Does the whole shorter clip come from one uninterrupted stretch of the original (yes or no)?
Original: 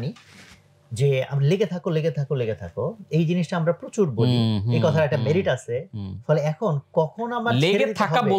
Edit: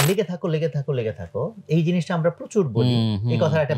yes